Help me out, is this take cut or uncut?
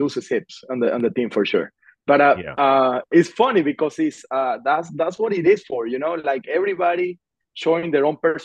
uncut